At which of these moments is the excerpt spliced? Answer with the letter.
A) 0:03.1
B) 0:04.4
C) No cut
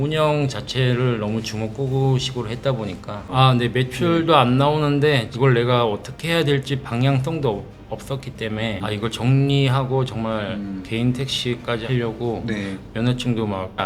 A